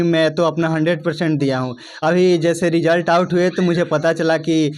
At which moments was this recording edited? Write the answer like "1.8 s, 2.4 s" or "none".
none